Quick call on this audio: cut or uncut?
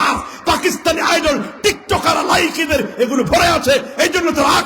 uncut